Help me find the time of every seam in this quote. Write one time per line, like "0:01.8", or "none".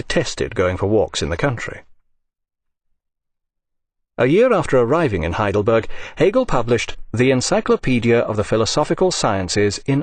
none